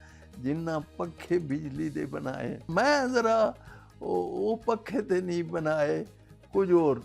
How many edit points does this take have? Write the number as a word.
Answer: one